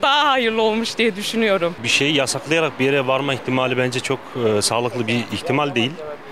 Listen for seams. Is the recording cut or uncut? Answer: cut